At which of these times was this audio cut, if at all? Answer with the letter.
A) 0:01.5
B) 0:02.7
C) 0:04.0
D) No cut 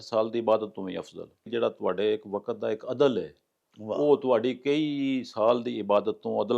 A